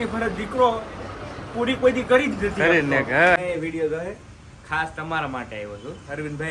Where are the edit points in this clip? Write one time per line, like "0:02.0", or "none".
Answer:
0:03.4